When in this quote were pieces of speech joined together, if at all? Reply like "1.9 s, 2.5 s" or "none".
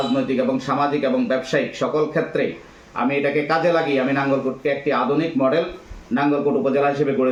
none